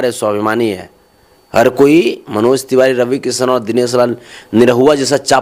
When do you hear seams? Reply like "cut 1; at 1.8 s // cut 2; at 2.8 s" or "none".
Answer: none